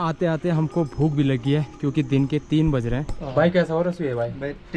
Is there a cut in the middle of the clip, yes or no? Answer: yes